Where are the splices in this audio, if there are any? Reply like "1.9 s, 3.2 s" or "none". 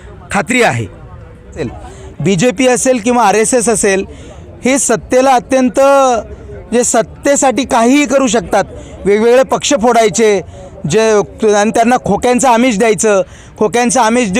1.6 s

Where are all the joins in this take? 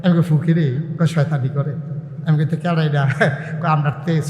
none

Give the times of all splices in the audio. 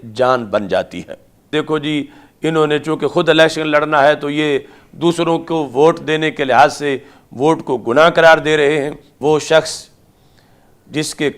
1.5 s, 9.0 s

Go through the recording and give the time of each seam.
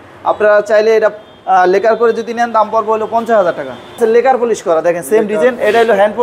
4.0 s

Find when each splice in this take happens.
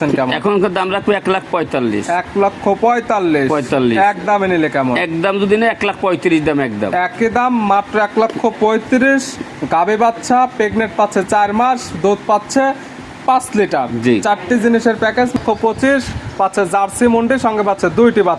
15.3 s

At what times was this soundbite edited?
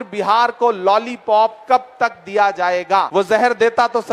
3.1 s

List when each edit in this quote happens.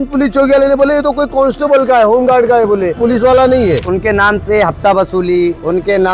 3.0 s, 3.8 s

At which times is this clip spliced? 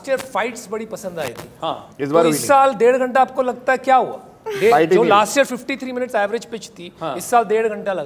none

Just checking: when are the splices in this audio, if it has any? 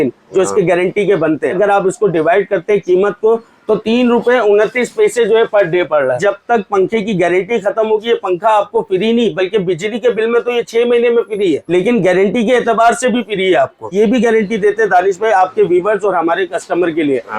1.5 s, 6.2 s, 11.6 s, 13.9 s

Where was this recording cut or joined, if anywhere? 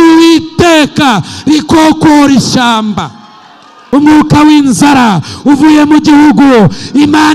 3.8 s

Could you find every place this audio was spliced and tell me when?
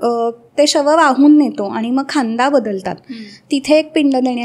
none

